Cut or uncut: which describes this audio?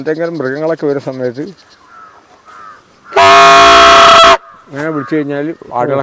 uncut